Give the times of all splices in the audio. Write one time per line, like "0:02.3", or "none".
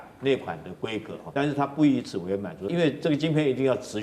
0:01.2
0:02.7